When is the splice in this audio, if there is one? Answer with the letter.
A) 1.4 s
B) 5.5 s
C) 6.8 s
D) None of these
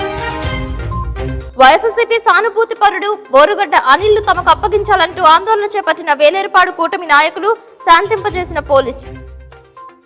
A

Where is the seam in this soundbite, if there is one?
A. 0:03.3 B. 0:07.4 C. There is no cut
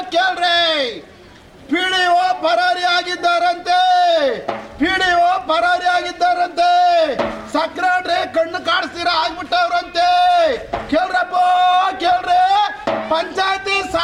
C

